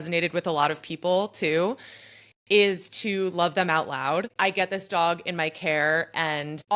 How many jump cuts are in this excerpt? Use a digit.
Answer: 1